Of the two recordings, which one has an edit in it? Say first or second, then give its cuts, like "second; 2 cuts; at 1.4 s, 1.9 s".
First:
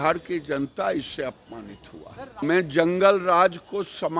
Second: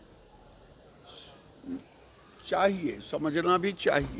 first; 1 cut; at 2.4 s